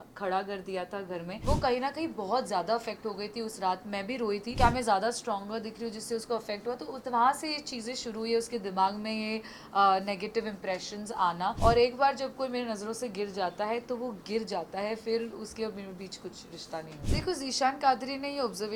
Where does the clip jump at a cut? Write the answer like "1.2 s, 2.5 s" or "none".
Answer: 1.3 s, 4.5 s, 11.6 s, 17.0 s